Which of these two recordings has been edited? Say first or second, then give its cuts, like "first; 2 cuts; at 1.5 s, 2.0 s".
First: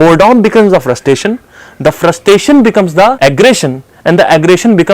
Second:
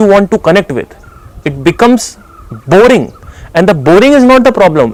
first; 1 cut; at 3.2 s